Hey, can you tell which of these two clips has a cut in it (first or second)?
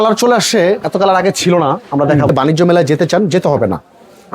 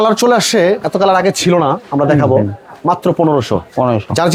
first